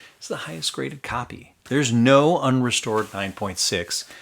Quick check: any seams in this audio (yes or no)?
yes